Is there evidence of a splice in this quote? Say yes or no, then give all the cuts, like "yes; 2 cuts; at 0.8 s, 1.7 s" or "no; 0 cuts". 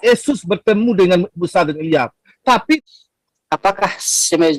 yes; 1 cut; at 2.8 s